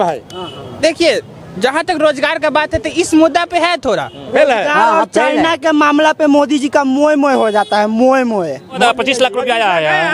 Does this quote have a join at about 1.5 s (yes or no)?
no